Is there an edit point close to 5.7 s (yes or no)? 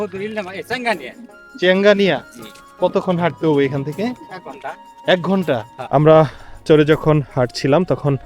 yes